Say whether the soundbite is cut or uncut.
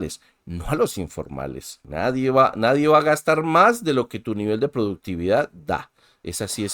cut